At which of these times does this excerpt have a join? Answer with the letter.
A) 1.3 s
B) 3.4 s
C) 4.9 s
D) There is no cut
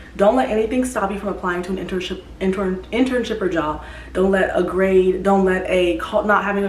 D